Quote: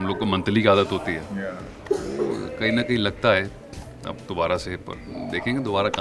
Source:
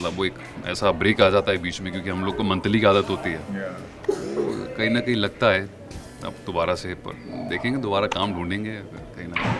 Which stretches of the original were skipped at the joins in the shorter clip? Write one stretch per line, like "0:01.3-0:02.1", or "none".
none

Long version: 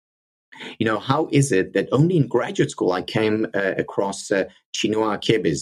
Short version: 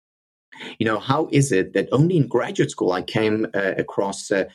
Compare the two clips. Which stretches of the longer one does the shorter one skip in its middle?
none

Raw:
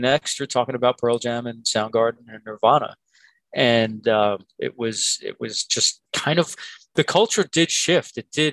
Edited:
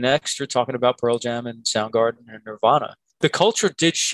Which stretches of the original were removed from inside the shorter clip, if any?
0:03.0-0:06.8

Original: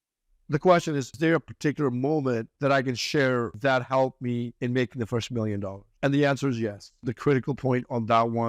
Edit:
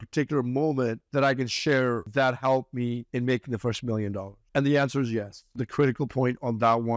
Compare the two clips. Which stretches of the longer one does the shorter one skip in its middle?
none

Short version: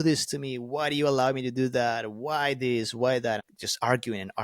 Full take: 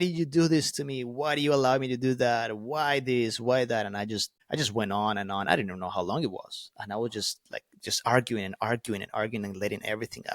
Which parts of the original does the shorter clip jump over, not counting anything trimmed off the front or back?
0:03.9-0:07.7

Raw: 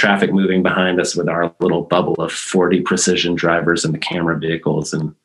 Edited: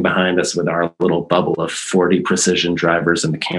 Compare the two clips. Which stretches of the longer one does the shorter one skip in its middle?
none

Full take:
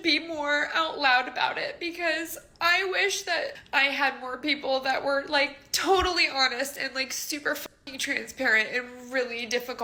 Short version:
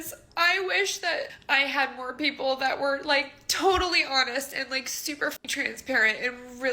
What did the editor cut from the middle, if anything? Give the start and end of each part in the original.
0:07.7-0:07.9

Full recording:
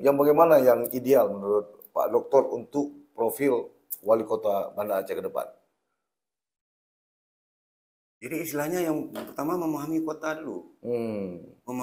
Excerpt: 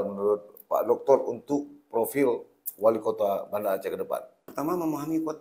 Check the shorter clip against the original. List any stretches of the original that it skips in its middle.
0:05.7-0:09.2

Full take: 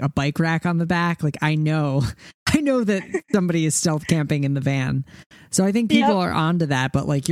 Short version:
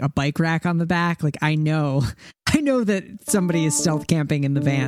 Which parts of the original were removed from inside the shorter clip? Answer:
none

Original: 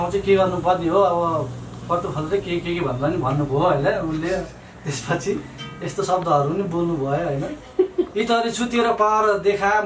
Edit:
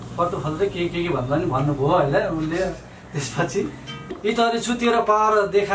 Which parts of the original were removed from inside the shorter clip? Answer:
0:05.9-0:08.1

